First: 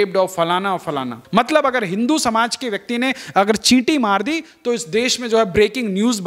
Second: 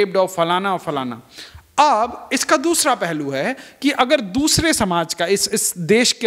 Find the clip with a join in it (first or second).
first